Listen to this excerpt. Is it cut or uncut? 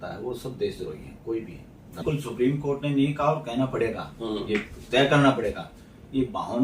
cut